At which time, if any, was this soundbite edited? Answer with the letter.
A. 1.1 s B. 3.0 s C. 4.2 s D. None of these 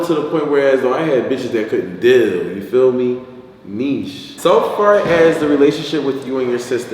C